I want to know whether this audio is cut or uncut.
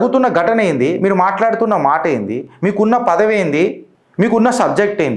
uncut